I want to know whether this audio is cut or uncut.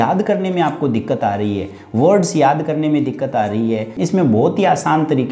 cut